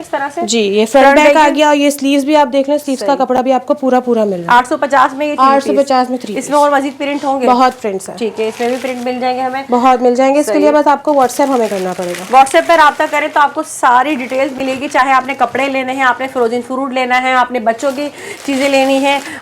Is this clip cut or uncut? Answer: uncut